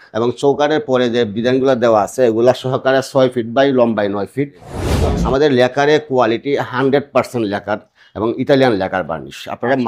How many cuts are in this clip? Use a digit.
1